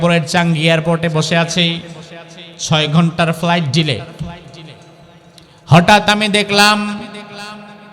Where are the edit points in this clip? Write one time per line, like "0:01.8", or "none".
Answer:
none